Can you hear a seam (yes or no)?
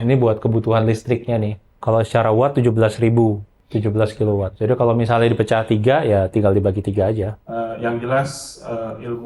yes